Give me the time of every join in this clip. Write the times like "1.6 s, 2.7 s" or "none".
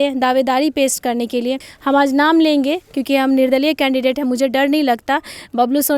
1.7 s